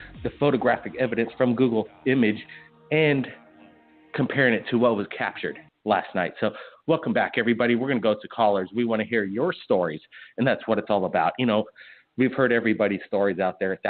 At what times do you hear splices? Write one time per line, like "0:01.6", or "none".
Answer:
0:01.6